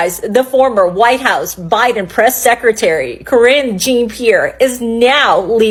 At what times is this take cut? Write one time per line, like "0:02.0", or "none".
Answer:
none